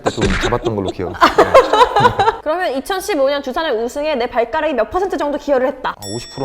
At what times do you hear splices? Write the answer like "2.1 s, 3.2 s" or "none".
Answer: 2.4 s